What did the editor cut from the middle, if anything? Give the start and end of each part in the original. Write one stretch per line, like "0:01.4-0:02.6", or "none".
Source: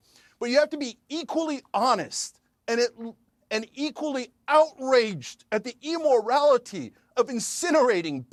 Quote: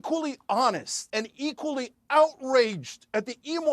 0:02.2-0:03.3